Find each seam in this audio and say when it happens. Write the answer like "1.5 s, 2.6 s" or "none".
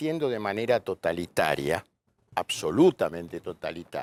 none